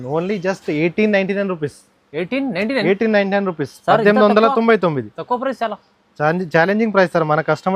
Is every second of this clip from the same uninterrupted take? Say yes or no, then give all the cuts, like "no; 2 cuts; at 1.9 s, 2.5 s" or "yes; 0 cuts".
yes; 0 cuts